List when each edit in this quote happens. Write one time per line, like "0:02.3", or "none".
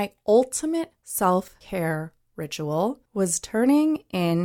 0:01.0
0:01.6
0:03.0